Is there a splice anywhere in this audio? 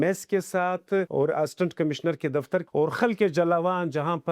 yes; 2 cuts; at 1.1 s, 2.7 s

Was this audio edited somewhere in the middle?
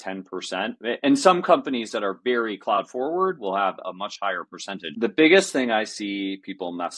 yes; 1 cut; at 4.8 s

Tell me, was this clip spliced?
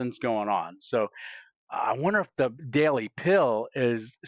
yes; 1 cut; at 2.6 s

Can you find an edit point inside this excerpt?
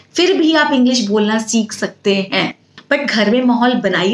yes; 1 cut; at 2.7 s

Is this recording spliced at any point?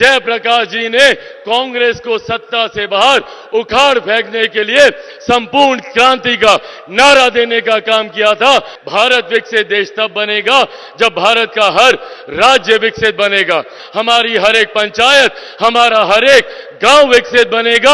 yes; 2 cuts; at 8.8 s, 13.8 s

